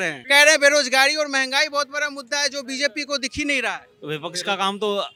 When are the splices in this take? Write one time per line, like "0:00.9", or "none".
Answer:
none